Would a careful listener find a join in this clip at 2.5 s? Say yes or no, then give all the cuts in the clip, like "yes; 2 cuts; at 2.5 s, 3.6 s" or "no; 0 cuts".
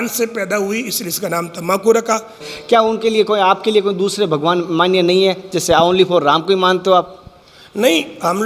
yes; 1 cut; at 2.5 s